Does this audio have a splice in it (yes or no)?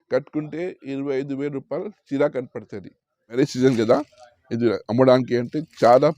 yes